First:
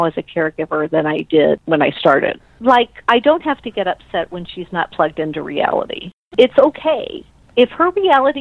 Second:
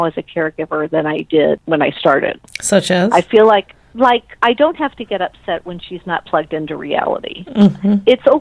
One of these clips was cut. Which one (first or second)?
first